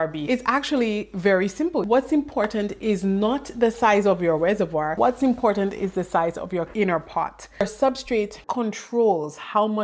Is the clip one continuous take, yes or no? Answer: no